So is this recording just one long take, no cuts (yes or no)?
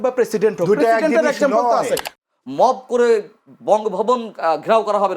no